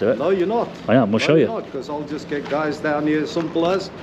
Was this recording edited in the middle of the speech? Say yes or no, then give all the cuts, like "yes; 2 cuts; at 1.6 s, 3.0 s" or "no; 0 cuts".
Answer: no; 0 cuts